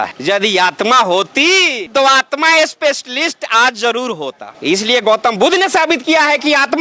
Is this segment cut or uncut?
uncut